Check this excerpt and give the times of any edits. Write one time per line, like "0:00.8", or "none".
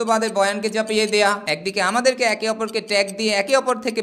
0:01.4